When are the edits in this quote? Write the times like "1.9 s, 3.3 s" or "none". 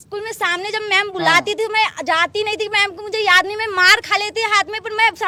none